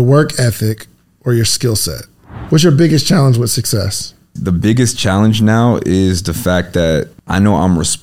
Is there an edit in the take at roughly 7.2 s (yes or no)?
yes